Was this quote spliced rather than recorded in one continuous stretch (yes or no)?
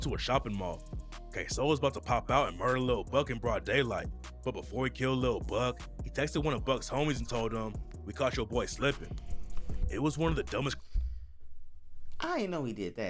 no